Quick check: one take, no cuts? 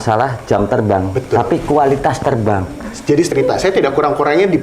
no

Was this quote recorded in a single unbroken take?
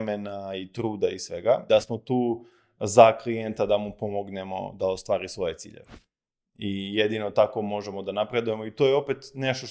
no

